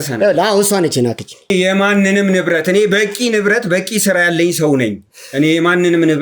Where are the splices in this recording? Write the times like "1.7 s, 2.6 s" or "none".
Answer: 1.5 s